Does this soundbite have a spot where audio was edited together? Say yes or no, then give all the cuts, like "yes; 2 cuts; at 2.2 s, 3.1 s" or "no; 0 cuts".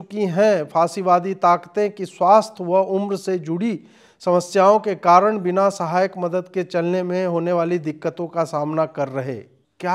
no; 0 cuts